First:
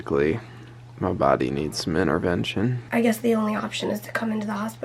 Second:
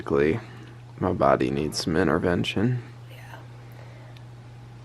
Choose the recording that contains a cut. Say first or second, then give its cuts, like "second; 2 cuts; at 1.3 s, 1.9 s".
first; 1 cut; at 2.8 s